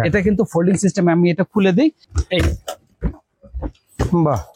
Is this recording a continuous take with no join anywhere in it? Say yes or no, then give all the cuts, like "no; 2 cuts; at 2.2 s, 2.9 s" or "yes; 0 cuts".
no; 1 cut; at 2.1 s